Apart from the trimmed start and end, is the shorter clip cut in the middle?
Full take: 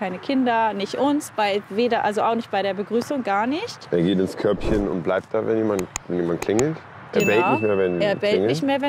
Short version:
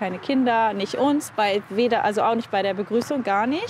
no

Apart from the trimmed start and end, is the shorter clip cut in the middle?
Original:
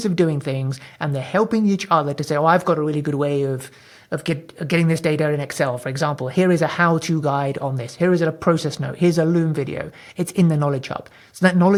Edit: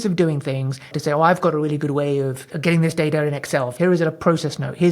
yes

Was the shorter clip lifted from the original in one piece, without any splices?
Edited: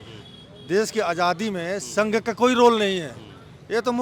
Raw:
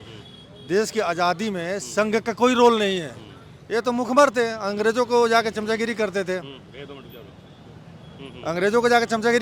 yes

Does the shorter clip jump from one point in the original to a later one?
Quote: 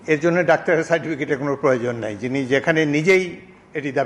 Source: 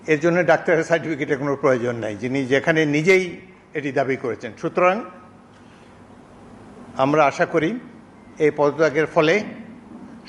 no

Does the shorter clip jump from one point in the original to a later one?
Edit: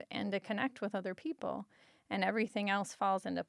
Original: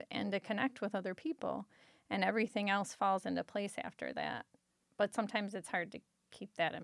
no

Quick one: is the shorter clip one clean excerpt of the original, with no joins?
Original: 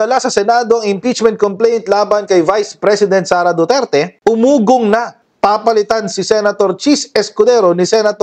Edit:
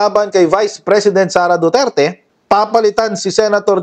no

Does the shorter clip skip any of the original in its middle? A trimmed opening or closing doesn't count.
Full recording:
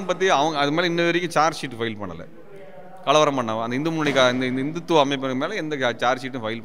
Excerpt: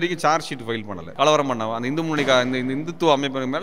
yes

